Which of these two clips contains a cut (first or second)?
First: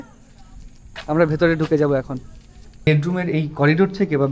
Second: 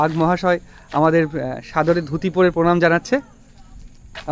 first